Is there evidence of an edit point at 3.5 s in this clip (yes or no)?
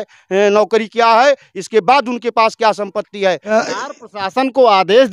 yes